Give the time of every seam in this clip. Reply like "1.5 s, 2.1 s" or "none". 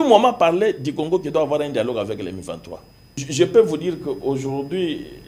3.2 s